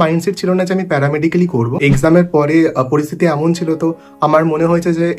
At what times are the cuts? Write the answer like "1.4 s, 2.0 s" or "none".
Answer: 1.8 s